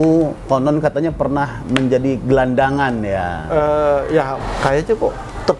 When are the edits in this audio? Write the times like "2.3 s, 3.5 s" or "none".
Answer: 4.4 s